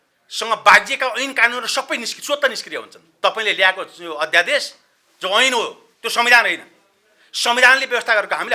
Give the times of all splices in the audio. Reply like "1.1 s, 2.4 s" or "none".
3.0 s